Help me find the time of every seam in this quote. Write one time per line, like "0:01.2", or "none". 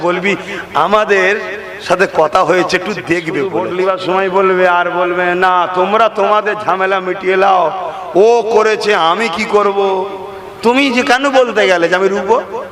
0:03.5